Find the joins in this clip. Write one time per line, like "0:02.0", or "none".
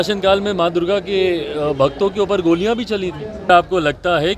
0:03.5